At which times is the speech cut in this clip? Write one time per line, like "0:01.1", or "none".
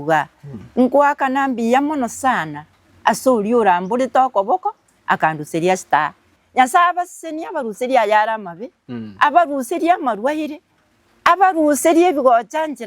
0:06.2